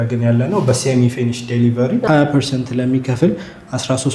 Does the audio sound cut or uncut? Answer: cut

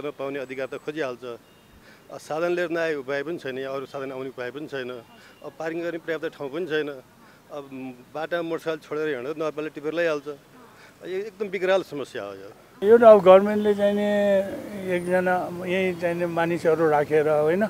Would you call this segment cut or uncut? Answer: cut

